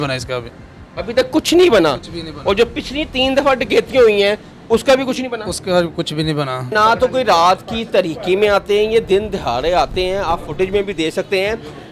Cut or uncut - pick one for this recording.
cut